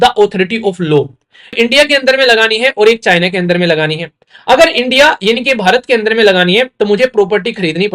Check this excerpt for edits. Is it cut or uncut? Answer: cut